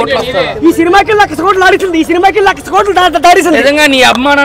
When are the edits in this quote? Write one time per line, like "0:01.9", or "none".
none